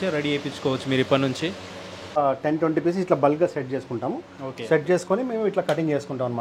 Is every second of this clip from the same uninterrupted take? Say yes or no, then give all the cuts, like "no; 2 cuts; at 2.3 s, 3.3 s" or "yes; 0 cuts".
no; 1 cut; at 2.2 s